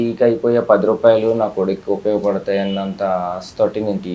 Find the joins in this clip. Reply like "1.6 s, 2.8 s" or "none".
none